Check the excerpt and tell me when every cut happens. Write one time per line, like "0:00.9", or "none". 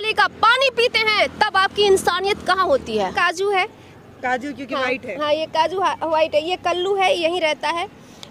0:03.1